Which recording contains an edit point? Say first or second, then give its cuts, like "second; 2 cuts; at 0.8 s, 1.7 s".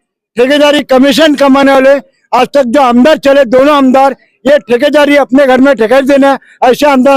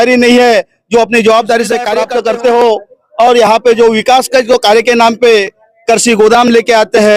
second; 1 cut; at 2.1 s